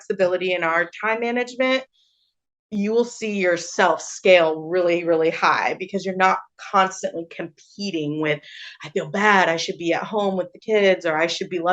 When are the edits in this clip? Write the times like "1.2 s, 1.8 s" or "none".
none